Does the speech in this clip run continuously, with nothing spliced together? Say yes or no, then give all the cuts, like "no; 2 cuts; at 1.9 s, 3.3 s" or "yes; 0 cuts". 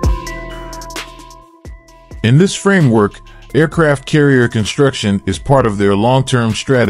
no; 1 cut; at 2.1 s